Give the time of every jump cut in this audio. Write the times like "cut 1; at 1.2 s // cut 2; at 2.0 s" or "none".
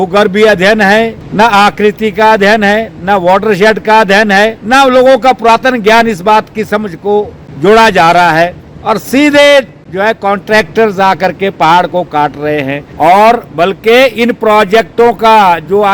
cut 1; at 1.2 s // cut 2; at 4.6 s // cut 3; at 7.4 s // cut 4; at 8.7 s // cut 5; at 9.8 s // cut 6; at 12.8 s